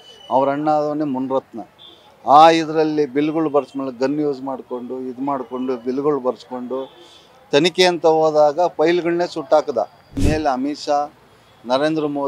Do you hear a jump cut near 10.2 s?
yes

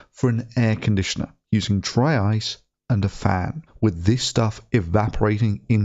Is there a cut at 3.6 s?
yes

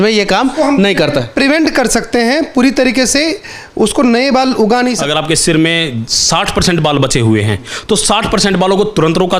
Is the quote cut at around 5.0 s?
yes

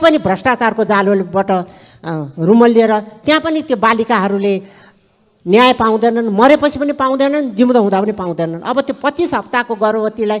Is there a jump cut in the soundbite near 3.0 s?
no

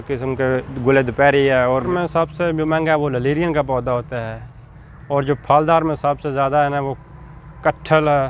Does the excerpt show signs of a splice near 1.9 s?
yes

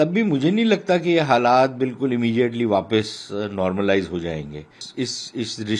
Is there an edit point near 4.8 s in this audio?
yes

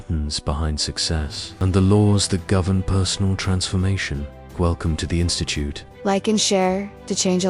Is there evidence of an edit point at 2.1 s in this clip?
no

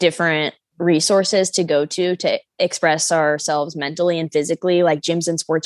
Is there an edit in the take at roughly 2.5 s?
yes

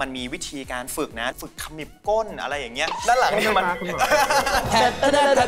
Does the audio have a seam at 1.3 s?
yes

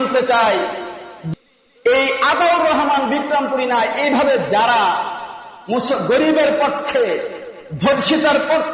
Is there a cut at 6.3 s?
no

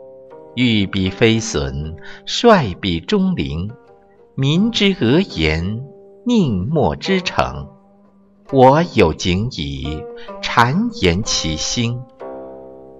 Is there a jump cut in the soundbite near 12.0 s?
yes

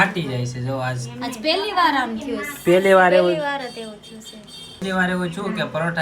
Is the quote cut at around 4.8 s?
yes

